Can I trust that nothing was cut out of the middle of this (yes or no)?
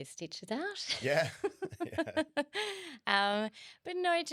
yes